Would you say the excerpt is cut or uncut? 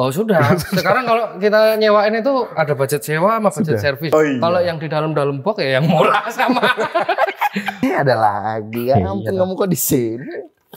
cut